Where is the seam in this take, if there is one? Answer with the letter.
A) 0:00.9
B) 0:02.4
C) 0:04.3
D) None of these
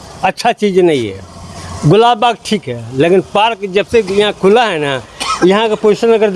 D